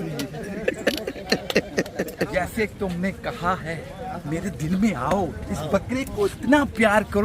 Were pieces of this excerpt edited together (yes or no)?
yes